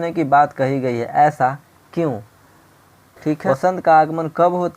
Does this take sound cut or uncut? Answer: cut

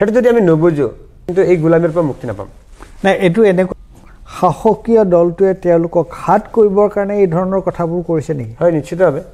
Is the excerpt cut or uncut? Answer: cut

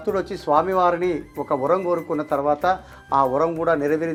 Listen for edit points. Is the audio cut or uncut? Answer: uncut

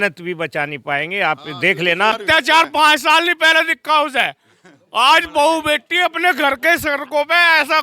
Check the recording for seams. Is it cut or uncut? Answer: cut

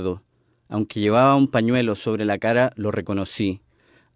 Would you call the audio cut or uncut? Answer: cut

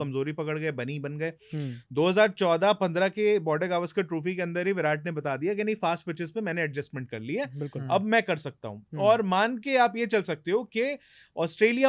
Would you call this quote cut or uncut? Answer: uncut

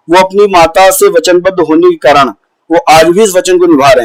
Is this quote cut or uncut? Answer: uncut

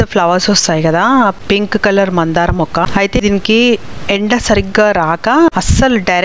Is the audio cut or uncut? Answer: uncut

